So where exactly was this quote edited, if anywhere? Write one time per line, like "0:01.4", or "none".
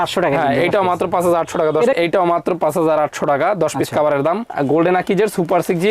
0:01.9
0:04.5